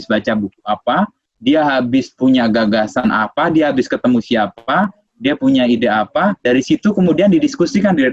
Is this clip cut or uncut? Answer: uncut